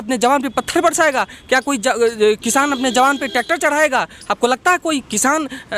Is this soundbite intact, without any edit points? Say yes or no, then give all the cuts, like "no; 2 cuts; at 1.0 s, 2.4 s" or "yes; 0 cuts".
yes; 0 cuts